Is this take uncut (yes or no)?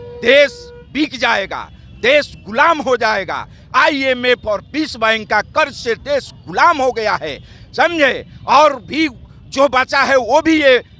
yes